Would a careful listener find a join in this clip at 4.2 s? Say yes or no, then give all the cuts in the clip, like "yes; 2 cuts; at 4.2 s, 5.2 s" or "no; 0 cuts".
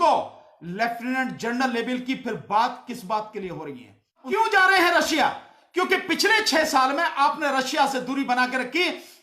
yes; 1 cut; at 4.2 s